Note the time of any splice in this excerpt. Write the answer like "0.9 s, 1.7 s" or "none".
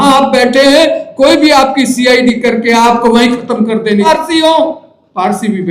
4.1 s